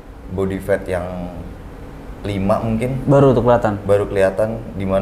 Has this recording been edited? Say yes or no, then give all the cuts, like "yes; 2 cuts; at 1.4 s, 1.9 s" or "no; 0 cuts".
no; 0 cuts